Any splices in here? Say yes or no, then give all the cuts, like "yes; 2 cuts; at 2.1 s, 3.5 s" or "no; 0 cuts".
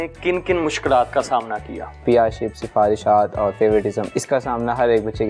yes; 2 cuts; at 2.0 s, 4.0 s